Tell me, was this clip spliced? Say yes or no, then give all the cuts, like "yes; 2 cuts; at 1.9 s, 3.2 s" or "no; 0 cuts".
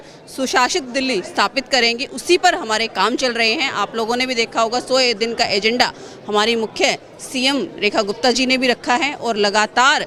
no; 0 cuts